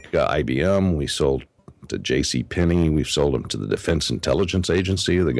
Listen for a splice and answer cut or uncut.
uncut